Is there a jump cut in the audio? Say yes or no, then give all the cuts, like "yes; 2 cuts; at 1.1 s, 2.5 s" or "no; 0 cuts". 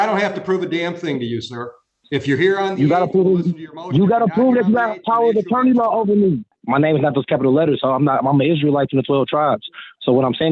yes; 1 cut; at 6.5 s